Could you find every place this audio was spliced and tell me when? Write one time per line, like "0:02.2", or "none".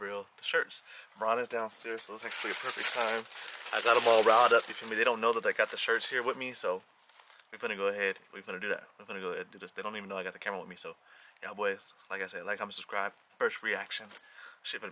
none